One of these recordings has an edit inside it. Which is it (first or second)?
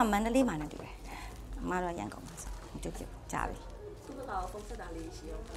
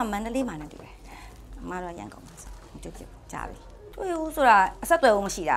second